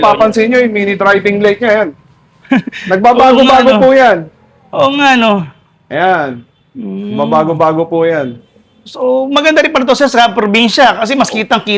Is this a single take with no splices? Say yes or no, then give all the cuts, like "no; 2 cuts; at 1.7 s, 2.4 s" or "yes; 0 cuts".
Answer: yes; 0 cuts